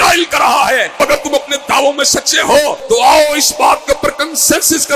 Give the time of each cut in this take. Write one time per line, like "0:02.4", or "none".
0:01.0
0:02.8